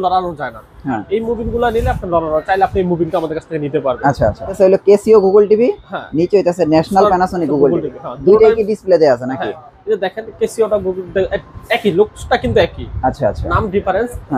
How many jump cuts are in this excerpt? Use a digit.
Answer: 1